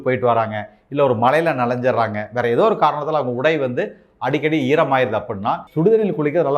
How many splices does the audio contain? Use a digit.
1